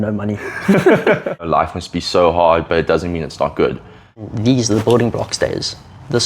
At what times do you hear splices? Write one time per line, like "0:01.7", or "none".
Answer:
0:01.5
0:04.1